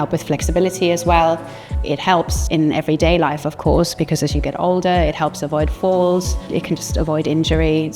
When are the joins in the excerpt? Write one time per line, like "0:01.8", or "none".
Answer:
0:02.0
0:06.5